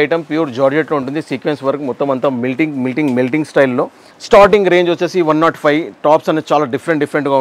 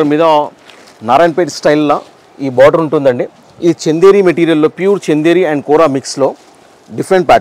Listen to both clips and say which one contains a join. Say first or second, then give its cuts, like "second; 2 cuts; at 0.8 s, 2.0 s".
first; 1 cut; at 4.1 s